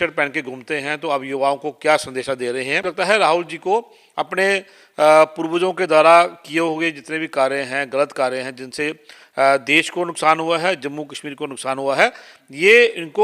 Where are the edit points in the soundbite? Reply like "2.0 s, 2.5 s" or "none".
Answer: 2.9 s